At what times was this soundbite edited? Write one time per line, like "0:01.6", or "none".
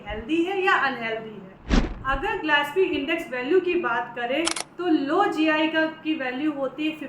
none